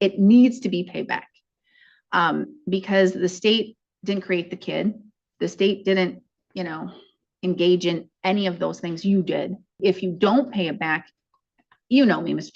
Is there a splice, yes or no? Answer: yes